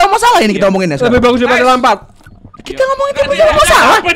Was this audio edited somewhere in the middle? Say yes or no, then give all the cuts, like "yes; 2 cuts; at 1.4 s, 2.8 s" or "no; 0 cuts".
no; 0 cuts